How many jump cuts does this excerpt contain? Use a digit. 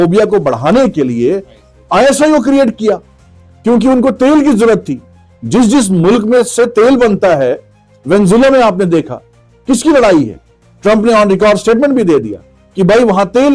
0